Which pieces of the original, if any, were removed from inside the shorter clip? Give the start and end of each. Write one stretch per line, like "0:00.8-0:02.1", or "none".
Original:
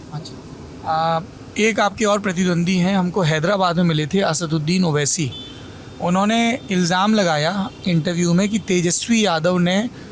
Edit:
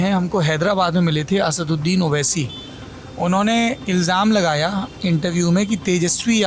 none